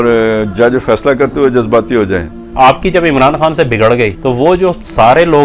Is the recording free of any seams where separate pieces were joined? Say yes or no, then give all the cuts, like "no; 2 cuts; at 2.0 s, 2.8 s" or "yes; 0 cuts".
no; 2 cuts; at 2.5 s, 4.2 s